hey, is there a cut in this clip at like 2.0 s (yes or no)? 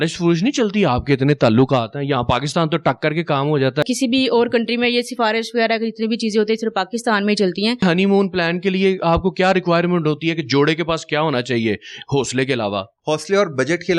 no